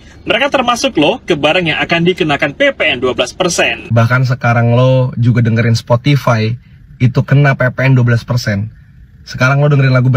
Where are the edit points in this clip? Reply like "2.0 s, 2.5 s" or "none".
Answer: 3.8 s